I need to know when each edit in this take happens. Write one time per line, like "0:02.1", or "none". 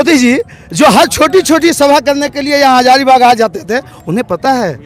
none